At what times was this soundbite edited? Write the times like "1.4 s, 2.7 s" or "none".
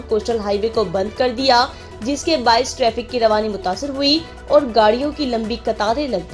none